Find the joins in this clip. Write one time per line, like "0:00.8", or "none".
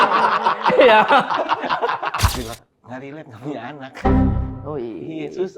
0:02.4